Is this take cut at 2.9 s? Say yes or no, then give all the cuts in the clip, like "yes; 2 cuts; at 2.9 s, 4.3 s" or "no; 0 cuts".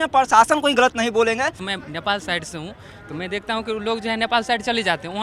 no; 1 cut; at 1.6 s